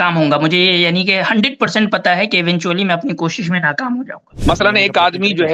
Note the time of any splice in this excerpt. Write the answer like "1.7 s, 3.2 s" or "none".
4.3 s